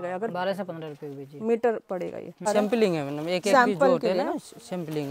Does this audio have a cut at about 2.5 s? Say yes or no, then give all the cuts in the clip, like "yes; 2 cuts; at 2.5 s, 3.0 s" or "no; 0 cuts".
yes; 1 cut; at 2.5 s